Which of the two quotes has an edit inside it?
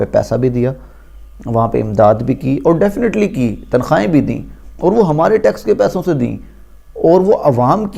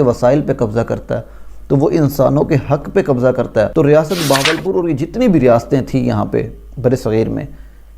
second; 1 cut; at 3.7 s

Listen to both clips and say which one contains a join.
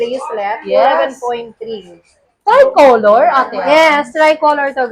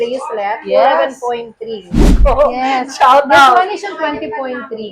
second; 1 cut; at 2.1 s

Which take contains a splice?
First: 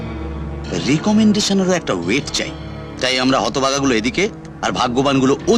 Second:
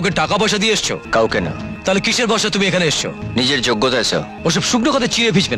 second; 4 cuts; at 1.0 s, 1.7 s, 3.2 s, 4.3 s

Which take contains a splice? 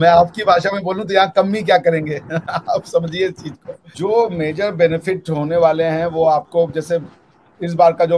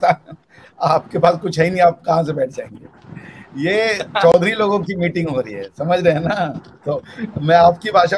first; 1 cut; at 3.7 s

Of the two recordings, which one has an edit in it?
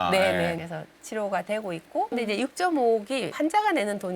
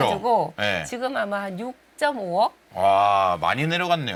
first; 1 cut; at 2.1 s

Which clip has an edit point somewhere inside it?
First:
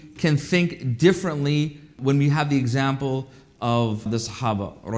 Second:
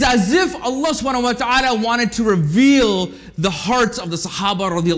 first; 2 cuts; at 2.0 s, 4.1 s

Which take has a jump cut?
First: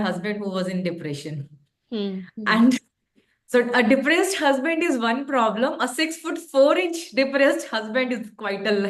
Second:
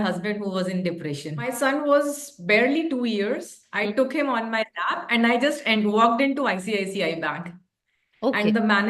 second; 1 cut; at 1.5 s

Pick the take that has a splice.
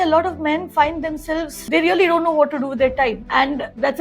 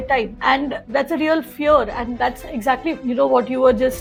first; 1 cut; at 1.5 s

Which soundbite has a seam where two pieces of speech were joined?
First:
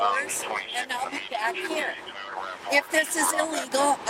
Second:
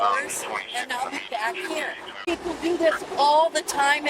second; 1 cut; at 2.2 s

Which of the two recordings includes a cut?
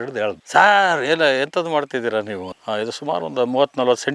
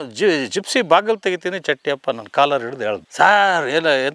first; 1 cut; at 2.5 s

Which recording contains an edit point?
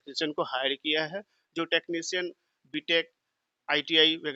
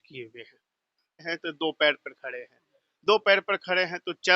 second; 1 cut; at 1.3 s

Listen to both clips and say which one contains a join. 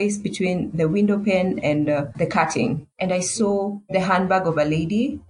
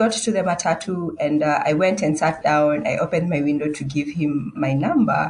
first; 2 cuts; at 2.1 s, 3.8 s

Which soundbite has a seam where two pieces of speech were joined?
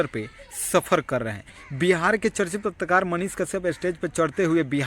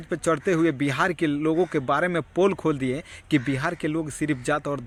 first; 1 cut; at 1.6 s

